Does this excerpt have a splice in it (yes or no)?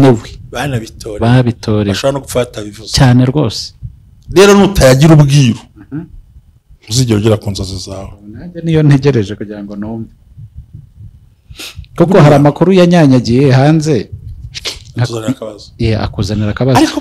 no